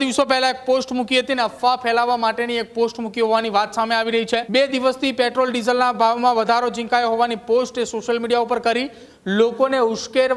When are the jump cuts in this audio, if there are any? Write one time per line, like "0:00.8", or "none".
0:04.5